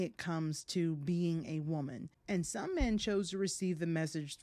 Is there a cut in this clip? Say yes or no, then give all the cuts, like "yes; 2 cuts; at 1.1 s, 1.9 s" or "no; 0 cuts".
no; 0 cuts